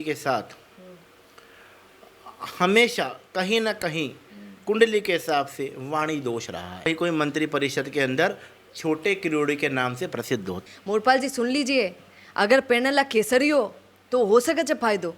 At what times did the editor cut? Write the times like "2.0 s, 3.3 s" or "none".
6.9 s, 10.7 s